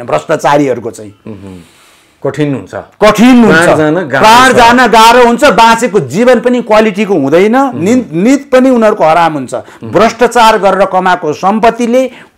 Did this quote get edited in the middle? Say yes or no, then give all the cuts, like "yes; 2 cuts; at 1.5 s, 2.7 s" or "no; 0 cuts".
no; 0 cuts